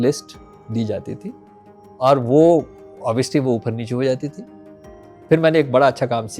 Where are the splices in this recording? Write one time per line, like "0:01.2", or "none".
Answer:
none